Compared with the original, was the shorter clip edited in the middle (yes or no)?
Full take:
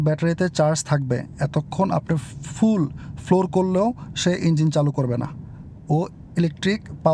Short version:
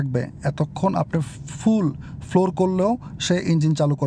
no